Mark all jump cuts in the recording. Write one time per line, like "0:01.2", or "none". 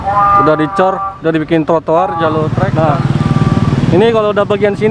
0:02.6